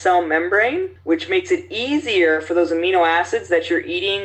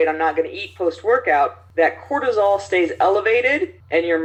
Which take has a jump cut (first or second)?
first